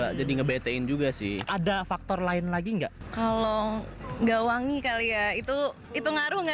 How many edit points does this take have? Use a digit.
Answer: 2